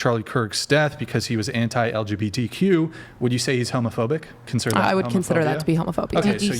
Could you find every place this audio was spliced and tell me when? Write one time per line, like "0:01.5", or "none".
0:04.5